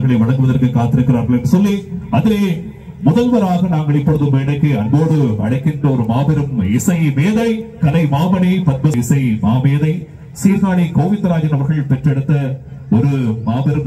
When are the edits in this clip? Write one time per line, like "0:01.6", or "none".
0:08.9